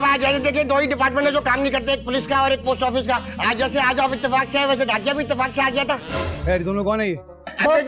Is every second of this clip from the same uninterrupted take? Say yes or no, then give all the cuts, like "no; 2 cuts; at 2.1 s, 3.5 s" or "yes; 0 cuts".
yes; 0 cuts